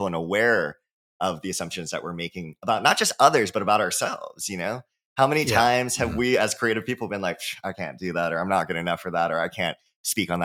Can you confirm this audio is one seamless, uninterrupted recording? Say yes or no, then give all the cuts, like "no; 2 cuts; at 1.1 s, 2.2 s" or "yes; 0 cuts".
yes; 0 cuts